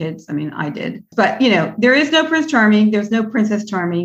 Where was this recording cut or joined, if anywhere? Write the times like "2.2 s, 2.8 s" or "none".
none